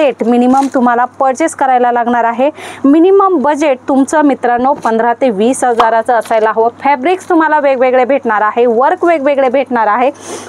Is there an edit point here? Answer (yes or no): no